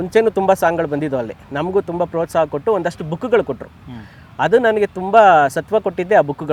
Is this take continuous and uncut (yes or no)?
yes